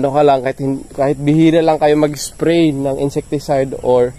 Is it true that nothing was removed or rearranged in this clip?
yes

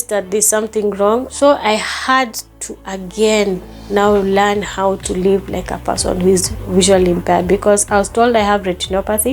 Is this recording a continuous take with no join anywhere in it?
no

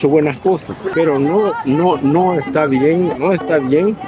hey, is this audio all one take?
no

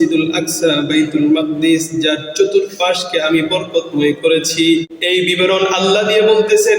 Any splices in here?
yes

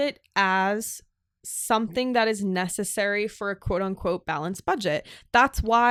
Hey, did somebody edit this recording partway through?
no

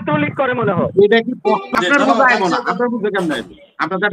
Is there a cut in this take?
yes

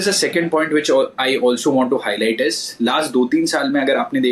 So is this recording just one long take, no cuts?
yes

